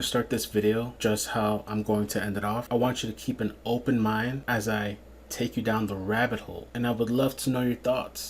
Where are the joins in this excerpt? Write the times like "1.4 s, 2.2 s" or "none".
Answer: 0.9 s, 2.6 s, 4.4 s, 6.6 s